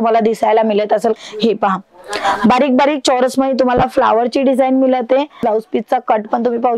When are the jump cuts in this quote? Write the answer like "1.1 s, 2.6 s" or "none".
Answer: 1.1 s, 5.4 s